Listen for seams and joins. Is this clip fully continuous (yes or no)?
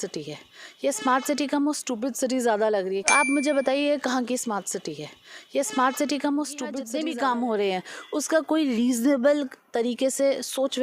no